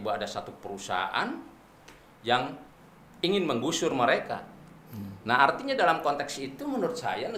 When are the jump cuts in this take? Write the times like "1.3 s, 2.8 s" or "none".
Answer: none